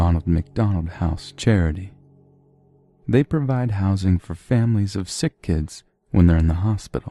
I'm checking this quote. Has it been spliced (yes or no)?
no